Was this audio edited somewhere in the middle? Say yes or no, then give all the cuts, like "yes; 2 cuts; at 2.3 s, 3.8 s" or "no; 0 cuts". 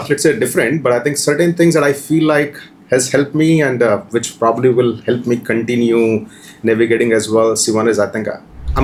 no; 0 cuts